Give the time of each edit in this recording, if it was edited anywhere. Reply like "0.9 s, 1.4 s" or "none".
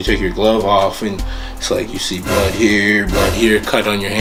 none